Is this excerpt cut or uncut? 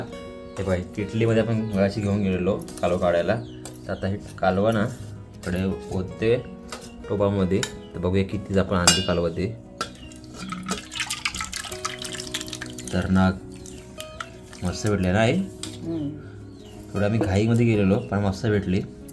uncut